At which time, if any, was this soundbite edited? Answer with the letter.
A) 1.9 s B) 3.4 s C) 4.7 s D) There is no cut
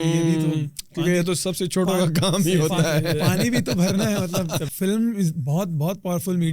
C